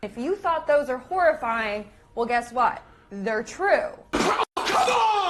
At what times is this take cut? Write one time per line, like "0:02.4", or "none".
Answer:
0:04.0